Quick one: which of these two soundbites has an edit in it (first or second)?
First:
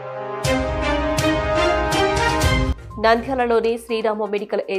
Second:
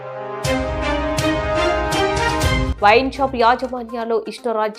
second